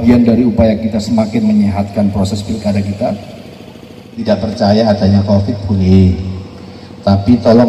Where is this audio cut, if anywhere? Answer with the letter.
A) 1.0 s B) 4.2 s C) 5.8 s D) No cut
B